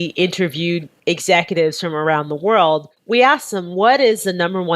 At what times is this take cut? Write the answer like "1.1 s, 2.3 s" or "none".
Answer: 0.9 s